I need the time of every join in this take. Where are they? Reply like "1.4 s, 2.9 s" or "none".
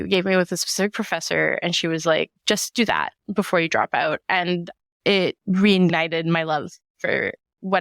2.4 s